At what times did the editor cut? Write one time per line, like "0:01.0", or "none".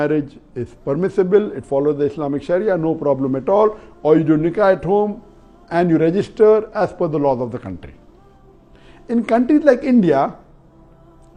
none

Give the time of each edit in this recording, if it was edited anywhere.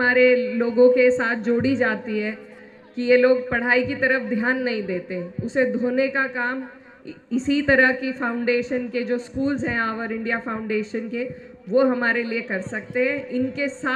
none

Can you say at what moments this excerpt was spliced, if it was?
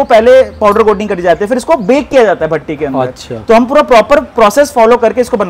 none

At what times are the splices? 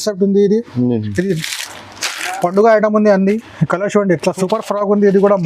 0:04.4

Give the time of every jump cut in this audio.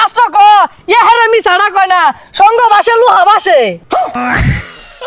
0:04.2

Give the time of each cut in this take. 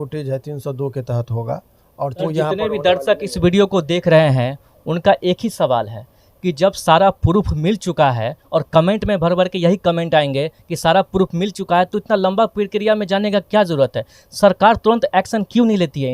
0:02.2

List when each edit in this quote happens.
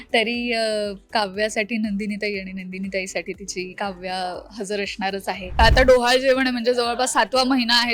0:05.6

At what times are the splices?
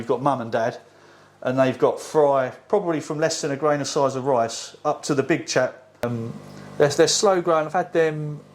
0:06.0

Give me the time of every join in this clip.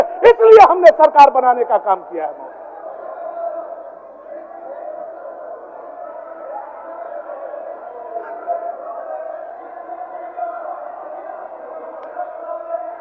none

